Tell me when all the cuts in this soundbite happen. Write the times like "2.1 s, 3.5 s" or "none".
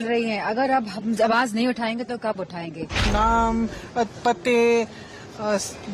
3.1 s